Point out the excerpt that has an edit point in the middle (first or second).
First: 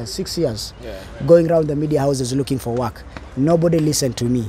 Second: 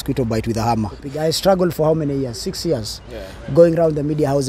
second